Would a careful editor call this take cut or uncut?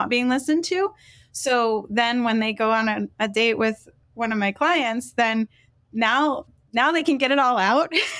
uncut